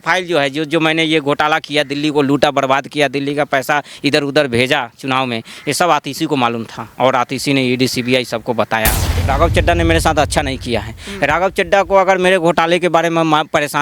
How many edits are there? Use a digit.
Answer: 1